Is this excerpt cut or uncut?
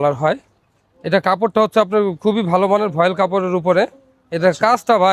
uncut